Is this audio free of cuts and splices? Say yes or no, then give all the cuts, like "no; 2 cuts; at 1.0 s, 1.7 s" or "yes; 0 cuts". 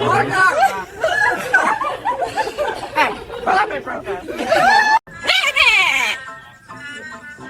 yes; 0 cuts